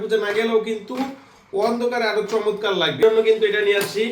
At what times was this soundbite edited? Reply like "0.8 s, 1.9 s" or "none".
3.0 s